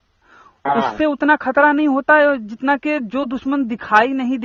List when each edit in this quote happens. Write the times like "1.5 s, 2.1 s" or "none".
none